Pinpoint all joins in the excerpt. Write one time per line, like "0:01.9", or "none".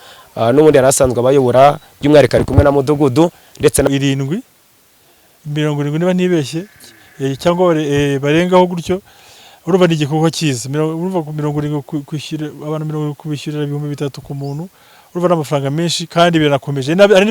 0:03.9